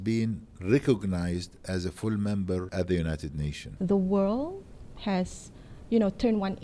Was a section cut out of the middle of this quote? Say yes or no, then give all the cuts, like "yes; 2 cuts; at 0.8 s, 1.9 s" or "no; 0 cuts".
yes; 2 cuts; at 2.7 s, 3.6 s